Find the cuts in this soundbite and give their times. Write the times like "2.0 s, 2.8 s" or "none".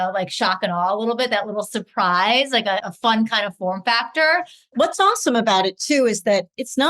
2.9 s, 4.7 s